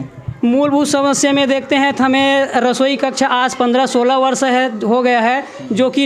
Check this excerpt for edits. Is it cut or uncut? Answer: uncut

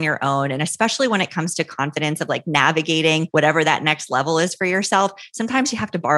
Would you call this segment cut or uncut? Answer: cut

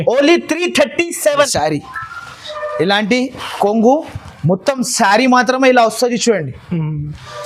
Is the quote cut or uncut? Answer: cut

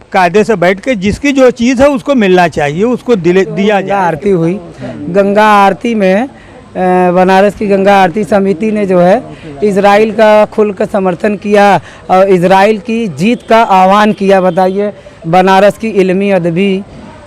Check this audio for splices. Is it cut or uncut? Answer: cut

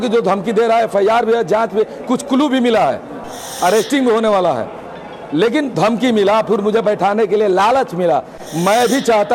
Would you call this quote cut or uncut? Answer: uncut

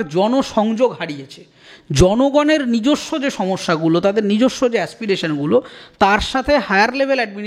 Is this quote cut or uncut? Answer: uncut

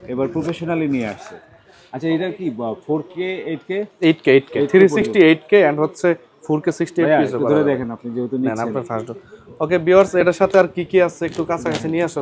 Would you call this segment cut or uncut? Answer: uncut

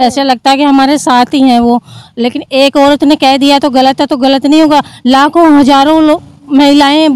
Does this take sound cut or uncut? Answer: uncut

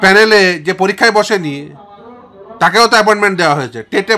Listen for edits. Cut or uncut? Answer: uncut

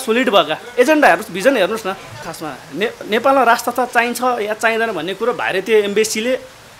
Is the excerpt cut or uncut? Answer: cut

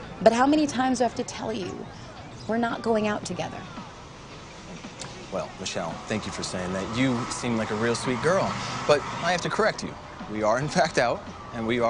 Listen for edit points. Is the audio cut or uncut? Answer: uncut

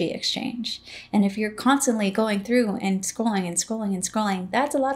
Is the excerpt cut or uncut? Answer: uncut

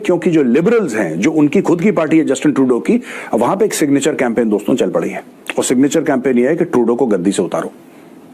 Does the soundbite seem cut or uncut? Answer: uncut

